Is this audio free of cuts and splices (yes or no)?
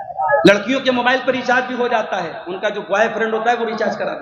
yes